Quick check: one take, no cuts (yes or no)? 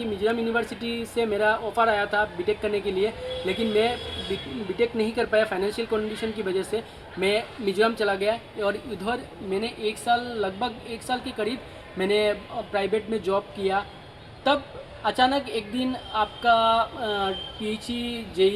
yes